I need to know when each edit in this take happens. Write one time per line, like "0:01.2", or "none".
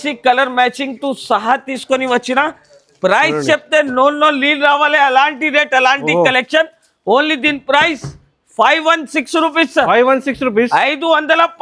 none